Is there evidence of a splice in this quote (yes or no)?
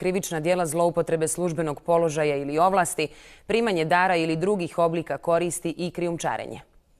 yes